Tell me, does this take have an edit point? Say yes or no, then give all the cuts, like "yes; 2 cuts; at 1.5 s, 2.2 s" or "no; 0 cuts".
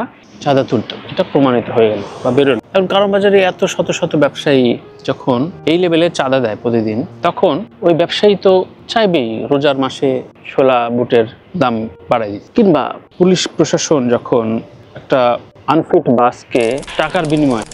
no; 0 cuts